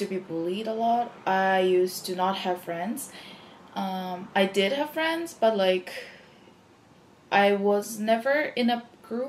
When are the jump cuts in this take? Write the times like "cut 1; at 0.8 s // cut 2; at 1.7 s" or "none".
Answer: none